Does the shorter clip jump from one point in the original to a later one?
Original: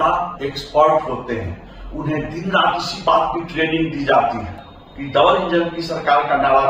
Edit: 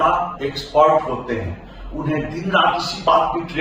no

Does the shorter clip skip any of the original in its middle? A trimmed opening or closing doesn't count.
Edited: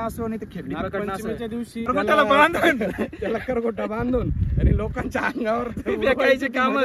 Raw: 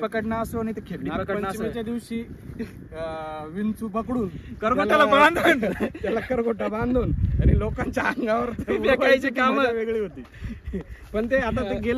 yes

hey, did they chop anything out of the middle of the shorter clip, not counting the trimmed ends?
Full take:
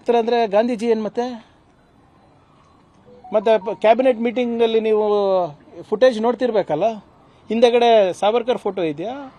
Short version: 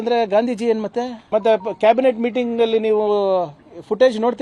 yes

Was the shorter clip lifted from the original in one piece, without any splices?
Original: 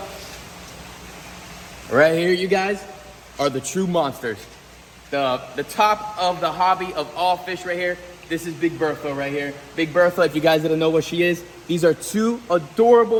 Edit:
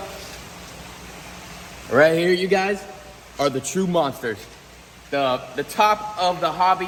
yes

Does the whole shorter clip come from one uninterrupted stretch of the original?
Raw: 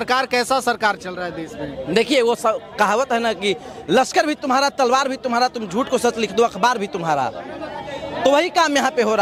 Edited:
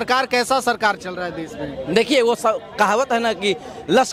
yes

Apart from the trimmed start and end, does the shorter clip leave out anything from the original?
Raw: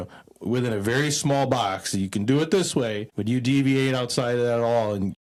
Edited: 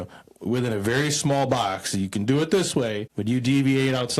no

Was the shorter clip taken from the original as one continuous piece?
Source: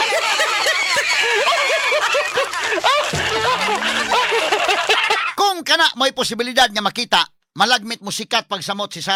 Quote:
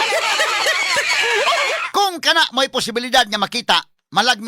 no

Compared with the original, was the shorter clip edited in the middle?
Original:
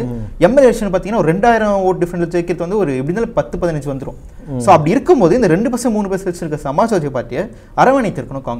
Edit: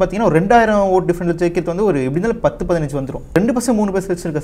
yes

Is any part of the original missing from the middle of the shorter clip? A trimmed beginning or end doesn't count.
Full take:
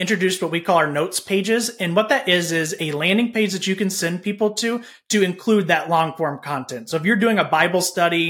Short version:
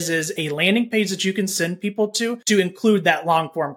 yes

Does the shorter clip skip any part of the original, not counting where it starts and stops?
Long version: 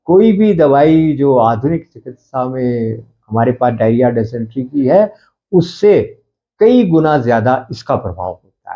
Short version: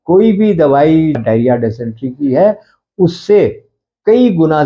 yes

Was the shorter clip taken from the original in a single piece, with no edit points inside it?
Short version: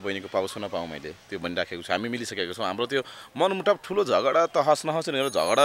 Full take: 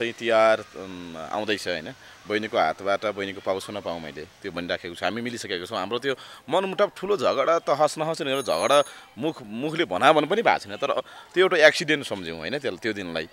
yes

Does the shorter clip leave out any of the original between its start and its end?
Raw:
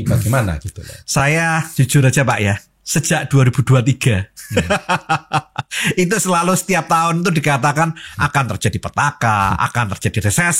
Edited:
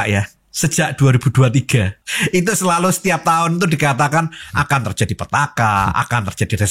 yes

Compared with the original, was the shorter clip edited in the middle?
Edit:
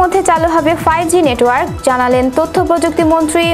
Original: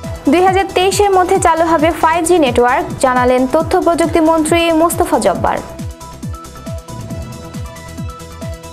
no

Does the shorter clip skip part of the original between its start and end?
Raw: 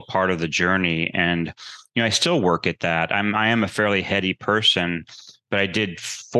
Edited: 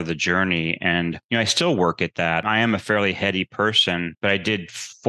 yes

